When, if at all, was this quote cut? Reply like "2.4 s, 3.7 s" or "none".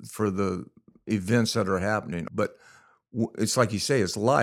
2.2 s